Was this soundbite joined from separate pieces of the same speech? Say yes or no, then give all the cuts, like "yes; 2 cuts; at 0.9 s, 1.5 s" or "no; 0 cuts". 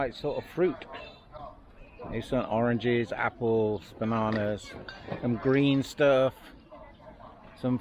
no; 0 cuts